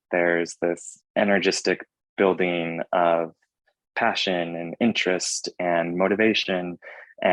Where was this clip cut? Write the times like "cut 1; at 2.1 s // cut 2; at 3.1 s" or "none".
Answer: cut 1; at 0.9 s